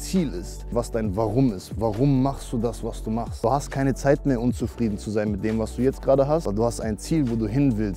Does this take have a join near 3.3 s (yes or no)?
yes